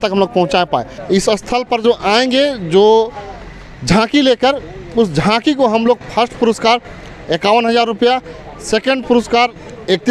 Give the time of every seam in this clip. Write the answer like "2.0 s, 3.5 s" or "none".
0.9 s